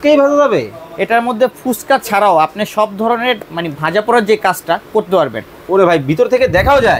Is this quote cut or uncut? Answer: uncut